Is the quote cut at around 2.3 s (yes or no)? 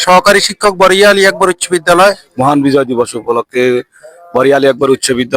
yes